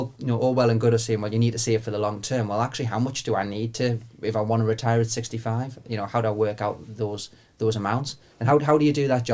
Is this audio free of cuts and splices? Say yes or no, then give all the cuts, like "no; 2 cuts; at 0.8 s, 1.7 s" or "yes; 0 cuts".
yes; 0 cuts